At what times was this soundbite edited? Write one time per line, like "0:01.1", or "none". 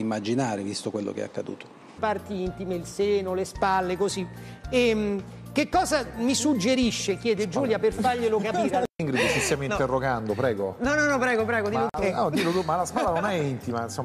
none